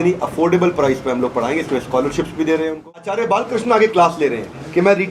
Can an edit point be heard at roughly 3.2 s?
yes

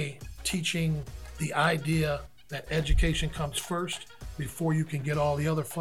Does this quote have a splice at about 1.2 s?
yes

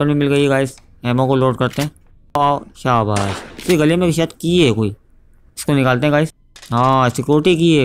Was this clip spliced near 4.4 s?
no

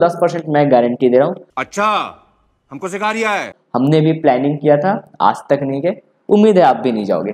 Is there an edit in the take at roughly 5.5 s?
no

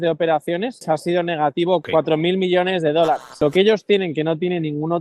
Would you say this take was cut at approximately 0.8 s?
yes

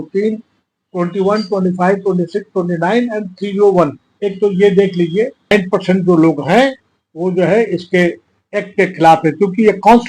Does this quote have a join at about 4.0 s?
no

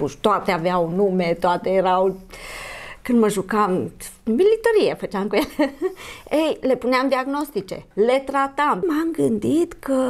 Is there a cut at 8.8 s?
yes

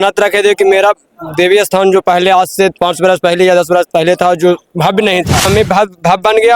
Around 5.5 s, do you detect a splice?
yes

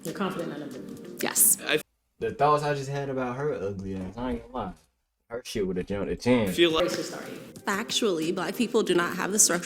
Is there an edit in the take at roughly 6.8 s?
yes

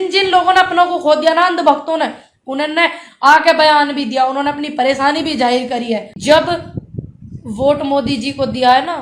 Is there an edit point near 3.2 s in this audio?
no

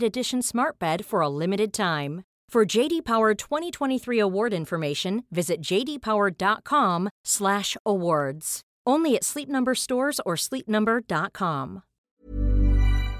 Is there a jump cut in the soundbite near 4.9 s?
no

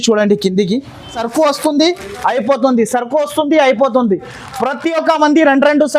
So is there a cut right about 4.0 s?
no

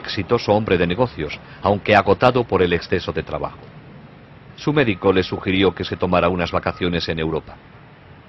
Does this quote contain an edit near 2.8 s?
no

